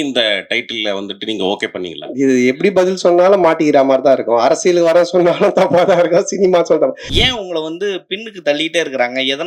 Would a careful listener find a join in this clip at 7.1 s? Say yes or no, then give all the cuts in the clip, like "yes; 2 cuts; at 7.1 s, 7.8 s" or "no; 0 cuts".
yes; 1 cut; at 7.1 s